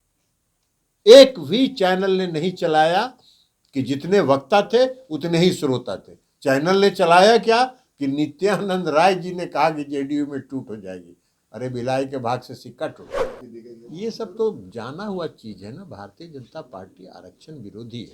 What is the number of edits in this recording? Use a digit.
1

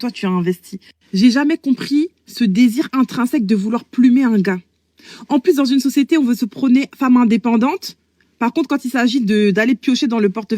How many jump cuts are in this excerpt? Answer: 1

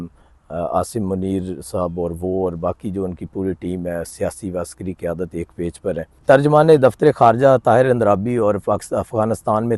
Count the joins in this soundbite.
0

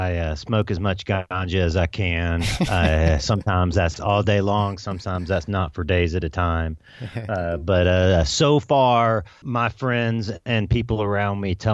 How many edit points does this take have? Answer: 1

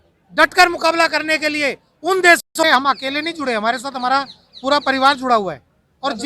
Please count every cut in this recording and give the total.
1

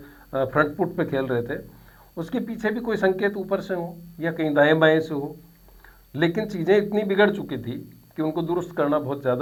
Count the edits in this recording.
0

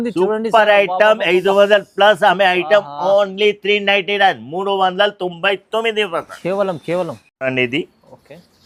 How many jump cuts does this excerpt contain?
0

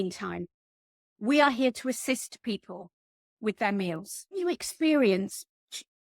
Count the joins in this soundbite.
1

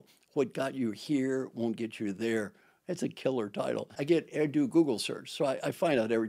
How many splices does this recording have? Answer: 1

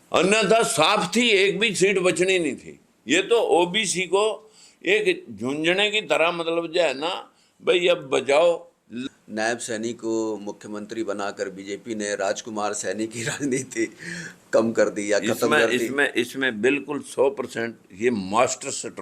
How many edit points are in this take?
1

